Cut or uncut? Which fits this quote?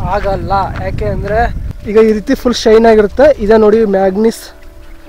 cut